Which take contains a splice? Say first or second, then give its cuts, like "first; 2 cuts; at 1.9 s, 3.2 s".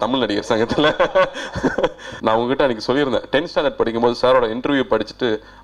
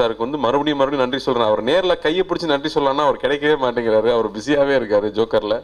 first; 1 cut; at 2.1 s